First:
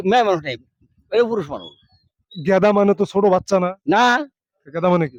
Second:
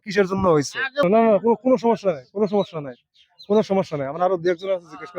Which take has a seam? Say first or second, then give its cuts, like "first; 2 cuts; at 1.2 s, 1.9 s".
second; 1 cut; at 1.0 s